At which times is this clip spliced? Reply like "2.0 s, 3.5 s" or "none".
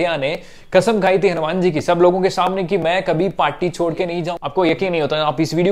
4.3 s